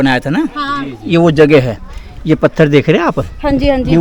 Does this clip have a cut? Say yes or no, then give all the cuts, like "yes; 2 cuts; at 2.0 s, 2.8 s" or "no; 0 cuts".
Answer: no; 0 cuts